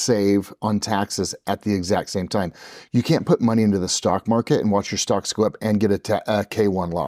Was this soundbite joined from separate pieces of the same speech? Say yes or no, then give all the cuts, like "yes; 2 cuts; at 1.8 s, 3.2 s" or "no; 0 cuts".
no; 0 cuts